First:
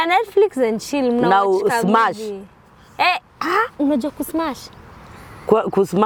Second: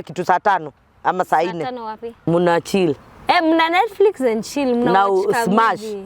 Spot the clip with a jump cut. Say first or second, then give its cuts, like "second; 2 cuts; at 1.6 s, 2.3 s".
second; 1 cut; at 2.2 s